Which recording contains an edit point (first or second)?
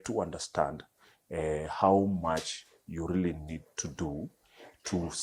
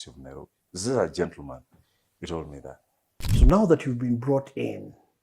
second